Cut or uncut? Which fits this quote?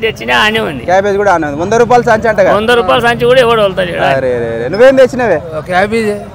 uncut